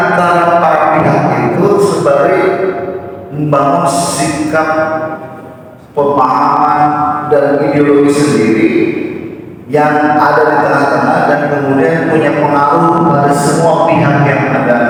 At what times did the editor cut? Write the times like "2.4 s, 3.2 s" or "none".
none

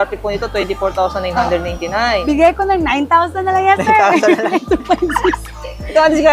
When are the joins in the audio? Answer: 2.2 s

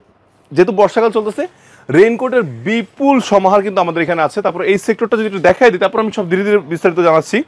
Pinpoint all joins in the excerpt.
none

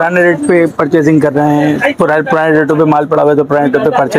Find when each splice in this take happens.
none

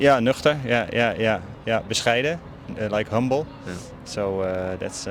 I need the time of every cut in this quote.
none

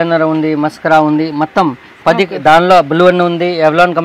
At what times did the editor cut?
none

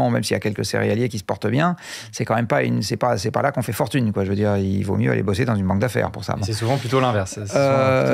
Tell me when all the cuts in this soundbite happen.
none

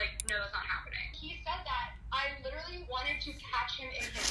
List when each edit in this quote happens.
1.2 s

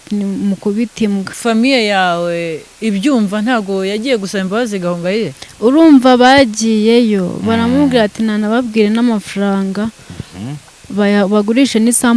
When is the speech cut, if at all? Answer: 1.3 s

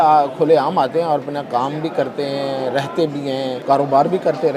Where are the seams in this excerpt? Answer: 3.6 s

